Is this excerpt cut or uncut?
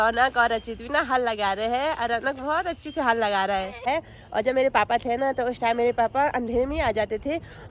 cut